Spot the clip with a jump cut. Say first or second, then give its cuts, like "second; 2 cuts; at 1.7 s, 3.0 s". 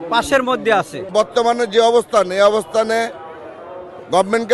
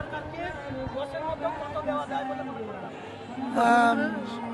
first; 1 cut; at 1.0 s